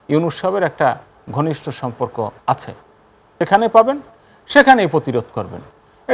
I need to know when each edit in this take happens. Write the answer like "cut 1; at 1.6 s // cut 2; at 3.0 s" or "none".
cut 1; at 3.3 s